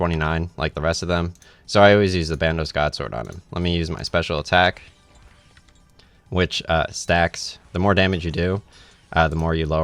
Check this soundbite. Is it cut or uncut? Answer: uncut